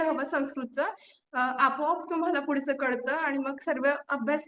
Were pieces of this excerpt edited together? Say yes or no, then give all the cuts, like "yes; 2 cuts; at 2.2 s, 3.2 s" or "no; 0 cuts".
no; 0 cuts